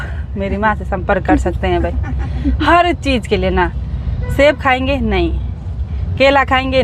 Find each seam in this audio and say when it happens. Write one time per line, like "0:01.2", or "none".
none